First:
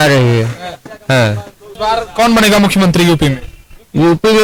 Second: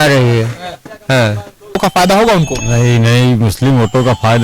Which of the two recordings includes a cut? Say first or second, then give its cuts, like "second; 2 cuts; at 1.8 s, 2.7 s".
second; 1 cut; at 1.5 s